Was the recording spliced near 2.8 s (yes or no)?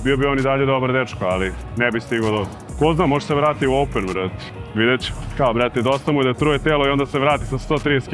no